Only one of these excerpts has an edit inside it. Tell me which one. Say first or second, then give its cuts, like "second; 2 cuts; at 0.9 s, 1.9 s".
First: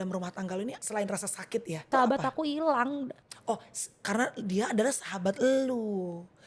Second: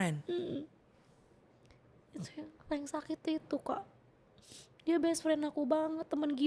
first; 3 cuts; at 0.8 s, 1.9 s, 3.3 s